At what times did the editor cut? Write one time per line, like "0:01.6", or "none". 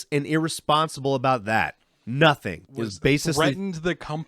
0:02.6